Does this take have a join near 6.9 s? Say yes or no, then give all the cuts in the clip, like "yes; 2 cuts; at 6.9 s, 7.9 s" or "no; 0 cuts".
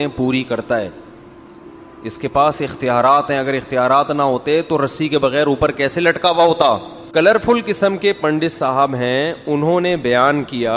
yes; 1 cut; at 6.9 s